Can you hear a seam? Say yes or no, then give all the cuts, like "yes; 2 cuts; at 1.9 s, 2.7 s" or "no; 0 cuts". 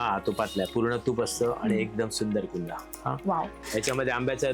yes; 1 cut; at 3.5 s